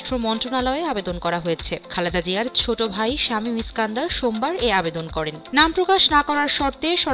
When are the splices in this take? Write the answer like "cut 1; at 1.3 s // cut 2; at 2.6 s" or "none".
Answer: none